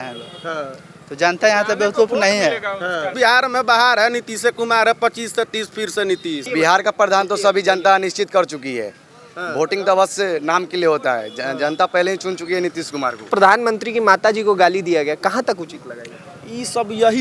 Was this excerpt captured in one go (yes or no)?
no